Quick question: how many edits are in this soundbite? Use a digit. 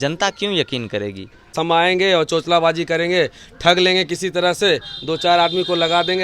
1